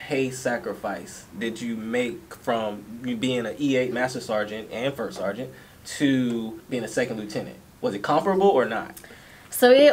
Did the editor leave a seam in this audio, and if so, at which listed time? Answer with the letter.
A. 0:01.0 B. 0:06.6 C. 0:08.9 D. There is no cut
B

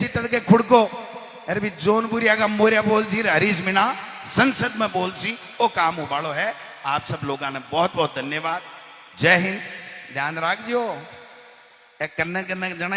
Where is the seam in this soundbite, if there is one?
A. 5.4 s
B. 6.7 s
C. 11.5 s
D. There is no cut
D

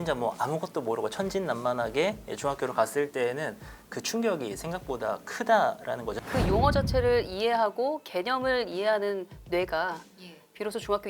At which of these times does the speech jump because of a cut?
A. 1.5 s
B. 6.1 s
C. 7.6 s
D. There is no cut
B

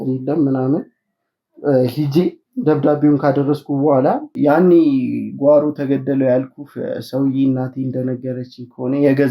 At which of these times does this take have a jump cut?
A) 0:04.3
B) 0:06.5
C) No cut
A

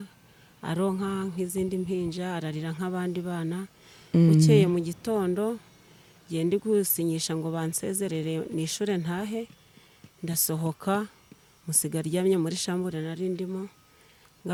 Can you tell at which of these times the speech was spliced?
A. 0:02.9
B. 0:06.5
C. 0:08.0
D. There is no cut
D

